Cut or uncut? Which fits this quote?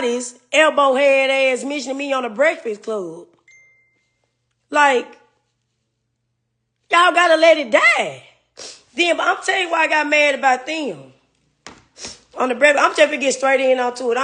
uncut